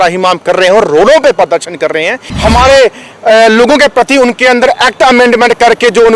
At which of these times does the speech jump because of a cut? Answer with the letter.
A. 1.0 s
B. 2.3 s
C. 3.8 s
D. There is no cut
B